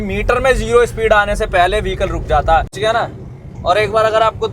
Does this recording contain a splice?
yes; 1 cut; at 2.7 s

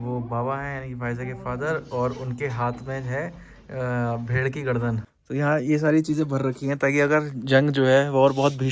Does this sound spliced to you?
yes; 1 cut; at 5.1 s

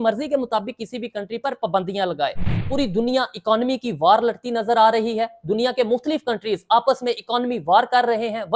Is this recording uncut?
no; 1 cut; at 2.6 s

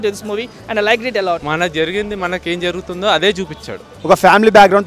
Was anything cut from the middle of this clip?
yes; 2 cuts; at 1.4 s, 3.9 s

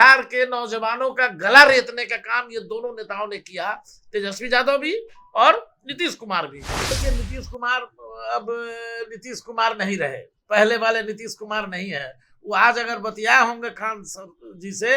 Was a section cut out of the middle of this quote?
yes; 1 cut; at 6.9 s

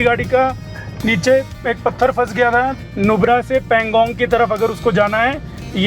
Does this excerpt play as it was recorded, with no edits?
no; 1 cut; at 2.8 s

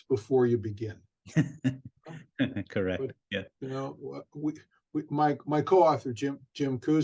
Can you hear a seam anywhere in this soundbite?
no; 0 cuts

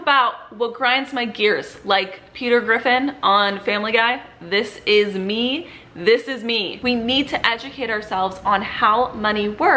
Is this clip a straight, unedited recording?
no; 1 cut; at 6.7 s

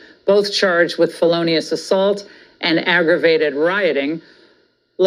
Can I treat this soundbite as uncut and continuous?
yes; 0 cuts

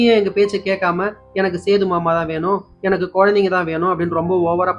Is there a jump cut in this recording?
no; 0 cuts

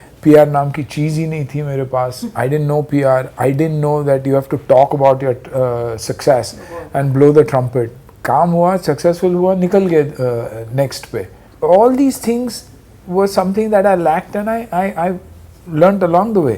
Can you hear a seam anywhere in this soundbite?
no; 0 cuts

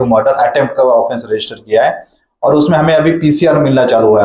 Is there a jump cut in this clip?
no; 0 cuts

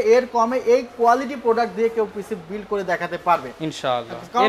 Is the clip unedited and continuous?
yes; 0 cuts

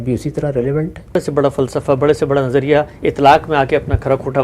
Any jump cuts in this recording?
yes; 1 cut; at 1.1 s

